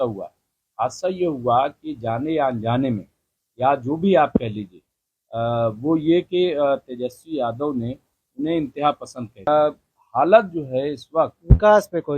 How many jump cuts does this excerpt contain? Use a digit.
1